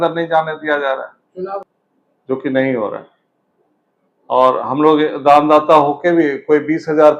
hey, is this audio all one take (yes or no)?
no